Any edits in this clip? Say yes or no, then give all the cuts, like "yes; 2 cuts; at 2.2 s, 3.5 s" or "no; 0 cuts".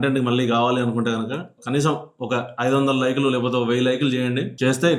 no; 0 cuts